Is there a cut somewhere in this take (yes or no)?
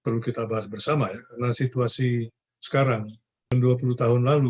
yes